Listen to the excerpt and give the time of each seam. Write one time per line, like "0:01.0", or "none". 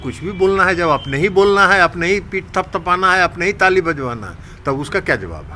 none